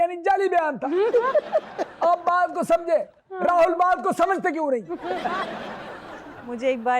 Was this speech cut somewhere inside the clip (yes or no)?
yes